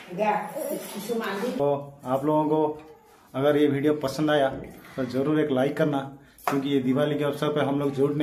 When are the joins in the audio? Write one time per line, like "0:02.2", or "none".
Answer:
0:01.0